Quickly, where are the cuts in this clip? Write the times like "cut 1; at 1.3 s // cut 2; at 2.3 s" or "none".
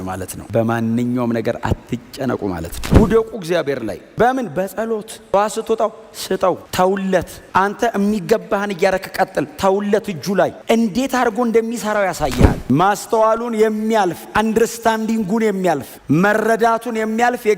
cut 1; at 2.8 s // cut 2; at 12.6 s

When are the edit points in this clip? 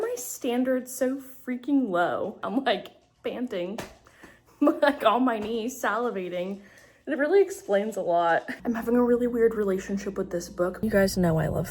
cut 1; at 2.4 s // cut 2; at 8.6 s // cut 3; at 10.8 s

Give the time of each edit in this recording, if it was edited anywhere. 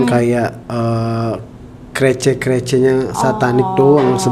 none

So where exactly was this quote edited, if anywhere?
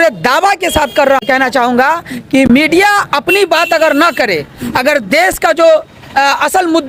none

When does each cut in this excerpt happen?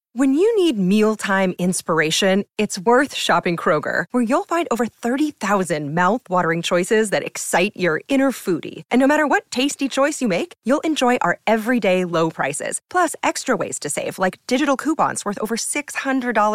none

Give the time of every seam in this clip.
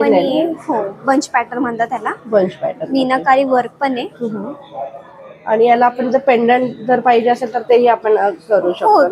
none

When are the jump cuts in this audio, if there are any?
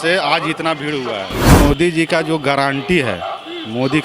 cut 1; at 1.5 s

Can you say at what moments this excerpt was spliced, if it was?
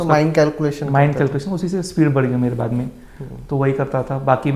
none

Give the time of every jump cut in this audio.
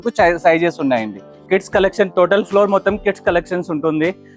cut 1; at 1.4 s

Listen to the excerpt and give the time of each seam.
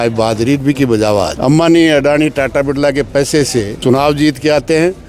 cut 1; at 1.3 s // cut 2; at 3.7 s

